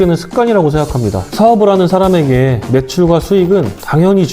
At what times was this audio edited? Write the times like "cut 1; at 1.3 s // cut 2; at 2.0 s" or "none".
cut 1; at 1.3 s